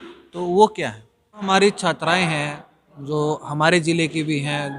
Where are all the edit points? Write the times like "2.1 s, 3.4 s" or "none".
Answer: 1.5 s